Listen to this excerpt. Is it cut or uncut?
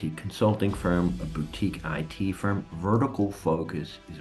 uncut